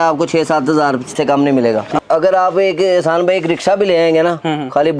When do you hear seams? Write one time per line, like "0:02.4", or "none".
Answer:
0:01.1
0:01.9